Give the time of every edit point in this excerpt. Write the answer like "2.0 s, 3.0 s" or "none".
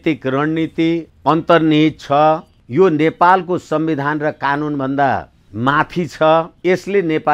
1.1 s, 2.6 s, 5.4 s, 6.5 s